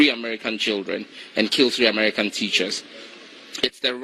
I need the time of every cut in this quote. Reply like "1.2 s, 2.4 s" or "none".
1.2 s